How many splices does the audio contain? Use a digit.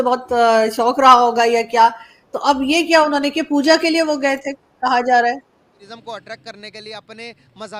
1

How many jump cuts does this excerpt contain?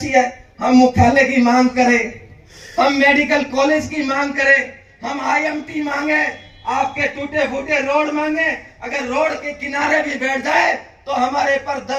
0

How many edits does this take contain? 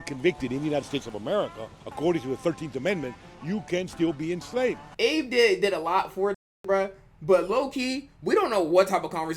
1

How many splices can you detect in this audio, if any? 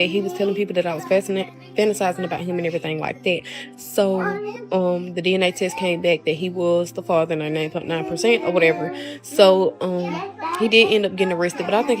0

